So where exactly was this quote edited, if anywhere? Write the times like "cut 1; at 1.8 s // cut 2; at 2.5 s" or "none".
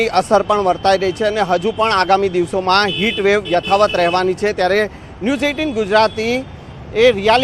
none